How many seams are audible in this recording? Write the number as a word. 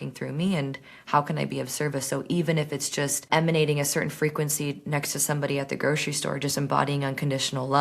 one